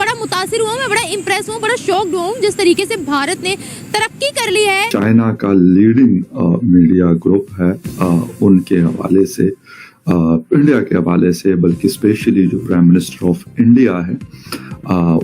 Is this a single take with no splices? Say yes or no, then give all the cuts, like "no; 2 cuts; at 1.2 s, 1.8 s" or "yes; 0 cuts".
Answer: no; 1 cut; at 5.0 s